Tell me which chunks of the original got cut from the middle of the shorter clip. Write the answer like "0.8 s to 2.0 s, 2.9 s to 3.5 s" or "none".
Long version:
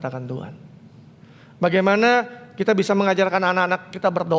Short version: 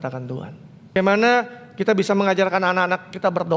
1.0 s to 1.8 s